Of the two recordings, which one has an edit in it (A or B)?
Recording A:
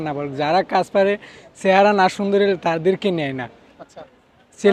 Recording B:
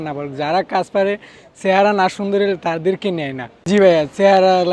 B